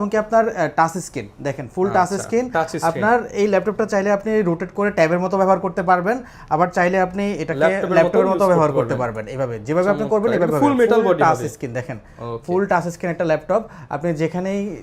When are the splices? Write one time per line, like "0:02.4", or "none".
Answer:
none